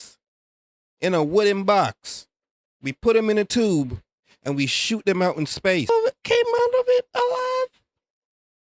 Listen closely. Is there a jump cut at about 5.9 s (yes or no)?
yes